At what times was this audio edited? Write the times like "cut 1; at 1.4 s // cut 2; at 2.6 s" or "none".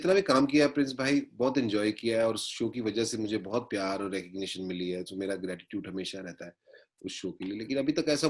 none